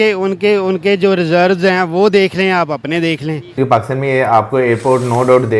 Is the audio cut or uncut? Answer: cut